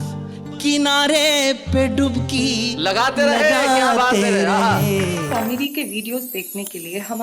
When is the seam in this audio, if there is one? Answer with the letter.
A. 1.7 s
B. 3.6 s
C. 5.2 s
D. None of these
C